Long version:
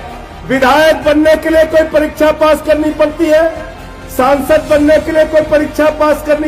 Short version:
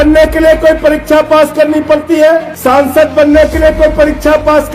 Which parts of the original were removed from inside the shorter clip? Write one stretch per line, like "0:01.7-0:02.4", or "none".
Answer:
0:03.6-0:04.0